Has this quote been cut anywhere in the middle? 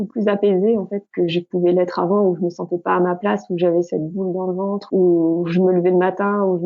yes; 2 cuts; at 1.1 s, 4.8 s

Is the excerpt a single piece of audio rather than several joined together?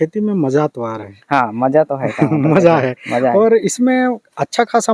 yes; 0 cuts

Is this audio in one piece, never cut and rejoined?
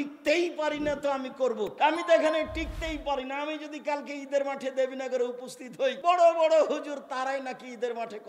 no; 2 cuts; at 1.7 s, 6.0 s

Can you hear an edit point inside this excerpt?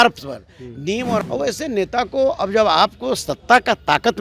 yes; 1 cut; at 1.3 s

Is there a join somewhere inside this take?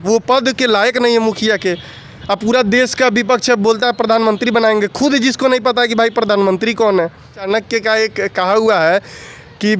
yes; 1 cut; at 7.5 s

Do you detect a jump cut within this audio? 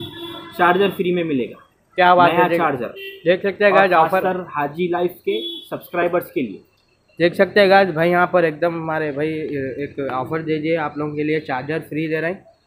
no; 0 cuts

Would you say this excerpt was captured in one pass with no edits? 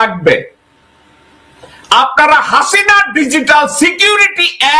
yes; 0 cuts

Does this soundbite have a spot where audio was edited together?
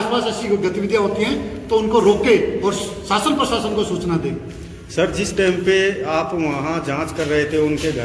no; 0 cuts

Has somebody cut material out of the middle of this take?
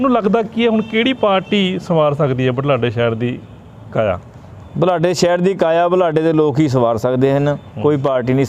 no; 0 cuts

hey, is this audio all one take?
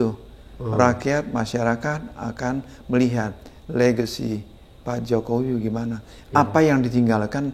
yes; 0 cuts

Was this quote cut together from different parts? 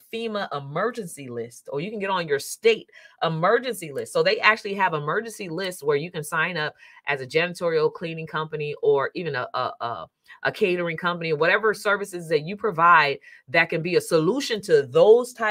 no; 0 cuts

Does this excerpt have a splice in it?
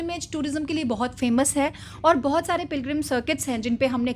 no; 0 cuts

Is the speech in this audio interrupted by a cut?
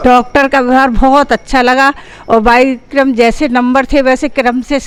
no; 0 cuts

